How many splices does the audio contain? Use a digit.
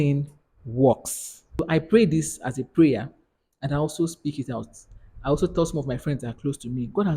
1